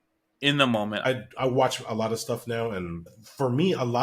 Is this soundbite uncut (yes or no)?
no